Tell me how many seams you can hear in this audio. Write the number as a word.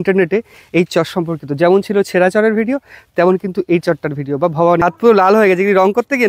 one